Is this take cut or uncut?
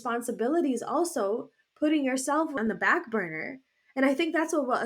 cut